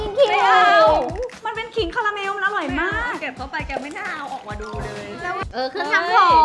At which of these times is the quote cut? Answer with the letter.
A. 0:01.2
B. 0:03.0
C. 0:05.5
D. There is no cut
C